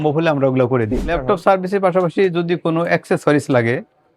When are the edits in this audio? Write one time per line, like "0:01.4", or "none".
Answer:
0:01.2

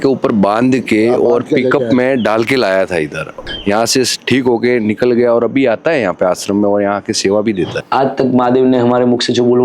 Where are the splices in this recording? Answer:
0:03.4
0:07.8

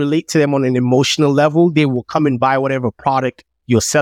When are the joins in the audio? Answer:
none

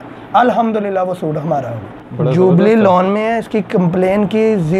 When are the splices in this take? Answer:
0:02.0

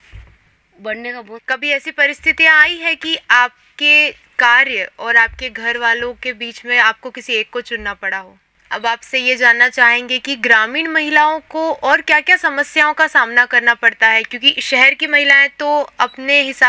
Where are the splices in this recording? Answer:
0:01.1
0:08.5

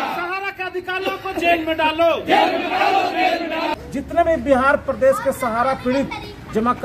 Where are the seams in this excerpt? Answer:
0:03.7

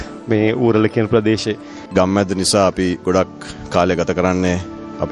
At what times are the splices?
0:01.7

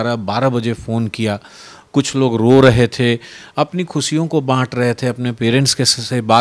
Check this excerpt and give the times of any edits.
none

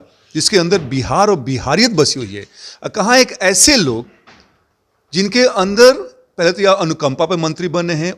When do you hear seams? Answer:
none

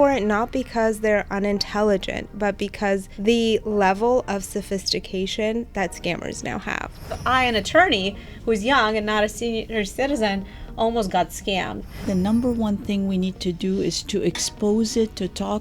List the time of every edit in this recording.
0:03.1
0:07.2
0:09.7
0:12.1

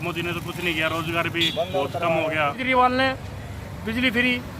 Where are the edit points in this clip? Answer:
0:02.6

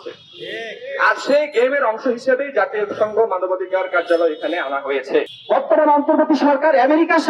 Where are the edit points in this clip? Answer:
0:05.3

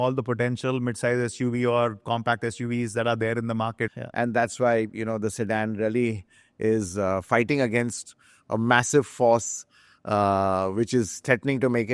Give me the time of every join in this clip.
0:03.9

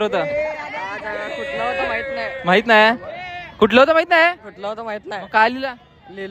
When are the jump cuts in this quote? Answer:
none

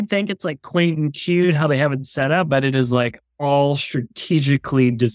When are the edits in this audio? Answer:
none

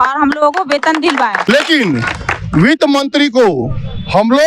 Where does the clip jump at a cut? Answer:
0:01.5

